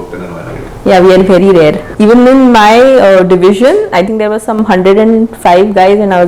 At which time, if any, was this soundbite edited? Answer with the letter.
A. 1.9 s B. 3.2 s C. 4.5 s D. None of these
A